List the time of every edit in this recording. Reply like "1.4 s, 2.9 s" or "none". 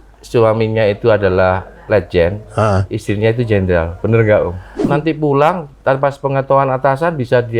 4.9 s